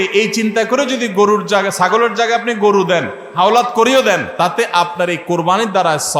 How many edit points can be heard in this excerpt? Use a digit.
1